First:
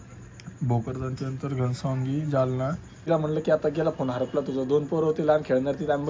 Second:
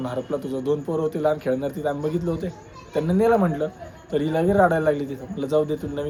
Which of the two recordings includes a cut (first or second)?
first